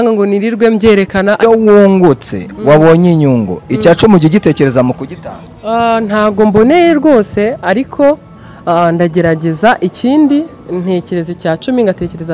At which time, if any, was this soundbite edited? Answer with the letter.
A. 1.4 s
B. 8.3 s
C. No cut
A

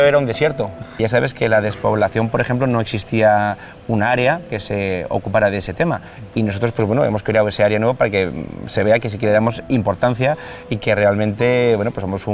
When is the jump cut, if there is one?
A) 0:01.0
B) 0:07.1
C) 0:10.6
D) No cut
A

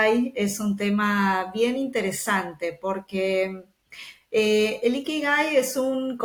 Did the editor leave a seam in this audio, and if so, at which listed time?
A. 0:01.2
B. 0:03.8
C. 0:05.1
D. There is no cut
D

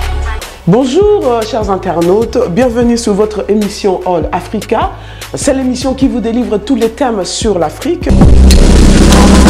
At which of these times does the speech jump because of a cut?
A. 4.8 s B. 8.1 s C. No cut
B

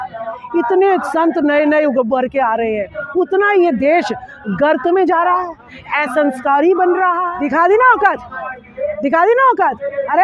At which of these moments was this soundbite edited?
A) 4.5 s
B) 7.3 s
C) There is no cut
B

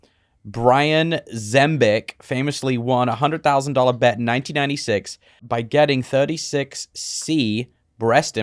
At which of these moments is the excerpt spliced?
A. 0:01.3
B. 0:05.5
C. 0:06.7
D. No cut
B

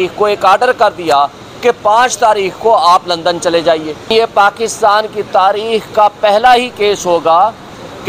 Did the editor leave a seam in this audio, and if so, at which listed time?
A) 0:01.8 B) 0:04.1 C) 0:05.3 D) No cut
B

